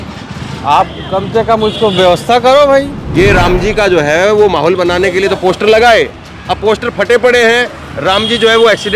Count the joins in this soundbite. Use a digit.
1